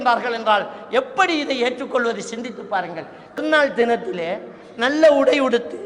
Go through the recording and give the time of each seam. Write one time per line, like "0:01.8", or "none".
0:03.4